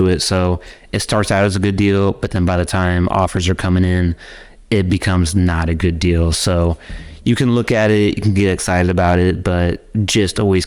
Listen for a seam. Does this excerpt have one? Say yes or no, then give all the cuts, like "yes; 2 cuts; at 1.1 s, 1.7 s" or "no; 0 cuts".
no; 0 cuts